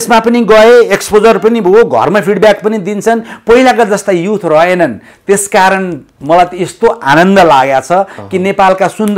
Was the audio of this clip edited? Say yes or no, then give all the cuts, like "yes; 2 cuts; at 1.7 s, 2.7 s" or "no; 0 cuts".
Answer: no; 0 cuts